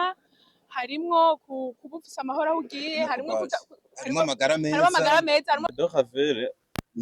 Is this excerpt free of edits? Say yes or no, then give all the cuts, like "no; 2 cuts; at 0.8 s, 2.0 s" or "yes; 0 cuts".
no; 1 cut; at 5.7 s